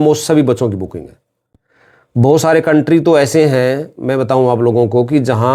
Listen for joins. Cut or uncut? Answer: uncut